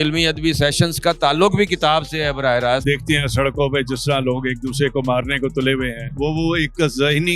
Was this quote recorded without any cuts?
no; 1 cut; at 2.8 s

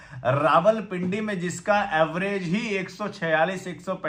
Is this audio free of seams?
yes; 0 cuts

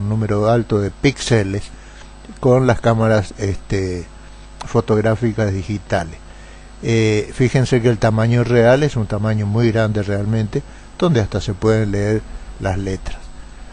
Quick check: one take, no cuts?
no; 1 cut; at 8.1 s

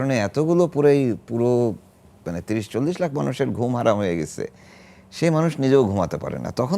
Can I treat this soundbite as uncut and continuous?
yes; 0 cuts

